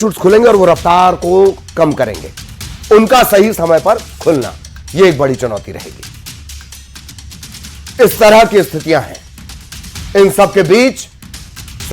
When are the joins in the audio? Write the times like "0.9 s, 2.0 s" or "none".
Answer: 8.8 s